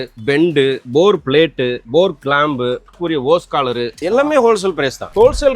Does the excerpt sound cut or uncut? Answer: cut